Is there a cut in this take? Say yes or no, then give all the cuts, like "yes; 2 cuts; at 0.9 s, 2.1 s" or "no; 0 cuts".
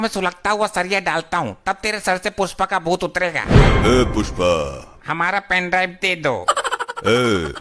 yes; 1 cut; at 4.9 s